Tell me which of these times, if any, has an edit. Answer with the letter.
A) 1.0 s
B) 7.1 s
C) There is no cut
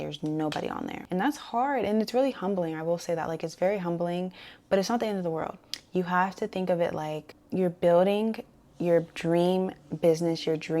A